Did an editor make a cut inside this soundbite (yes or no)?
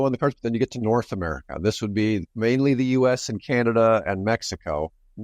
yes